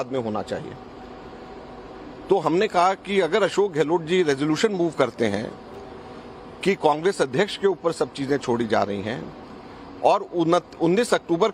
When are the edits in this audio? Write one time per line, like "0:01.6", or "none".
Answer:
0:10.0